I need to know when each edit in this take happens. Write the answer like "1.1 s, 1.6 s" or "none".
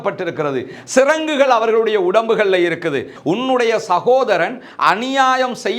3.1 s